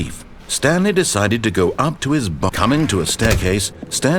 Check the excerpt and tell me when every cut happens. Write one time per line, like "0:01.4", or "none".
0:02.5